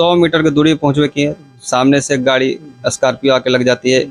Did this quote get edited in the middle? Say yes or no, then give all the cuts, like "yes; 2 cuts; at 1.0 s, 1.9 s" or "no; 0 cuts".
no; 0 cuts